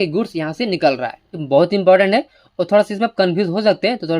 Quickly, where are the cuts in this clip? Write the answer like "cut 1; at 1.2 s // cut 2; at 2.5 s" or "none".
cut 1; at 1.4 s